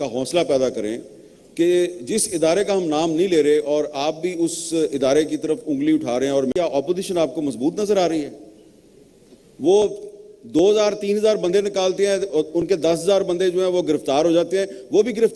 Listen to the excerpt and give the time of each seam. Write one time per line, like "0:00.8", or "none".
0:06.5

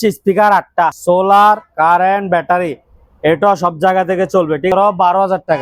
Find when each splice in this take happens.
0:01.0
0:04.7

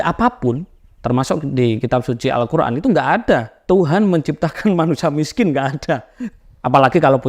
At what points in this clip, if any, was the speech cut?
0:03.5
0:06.2

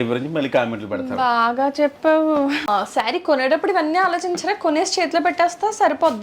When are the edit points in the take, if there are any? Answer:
0:02.7

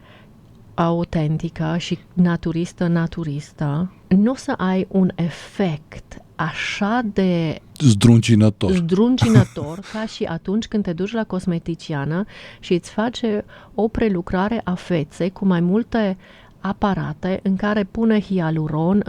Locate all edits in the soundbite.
0:04.0
0:07.6

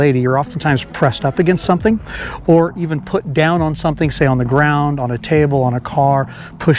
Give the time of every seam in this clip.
none

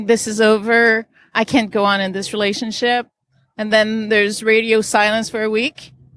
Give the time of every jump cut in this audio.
0:01.3

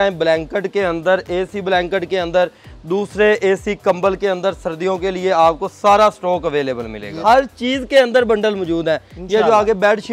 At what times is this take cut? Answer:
0:07.2

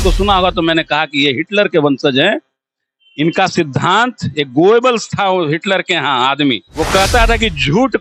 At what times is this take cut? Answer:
0:06.7

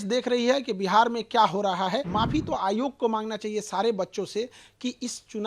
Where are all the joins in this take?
0:02.1

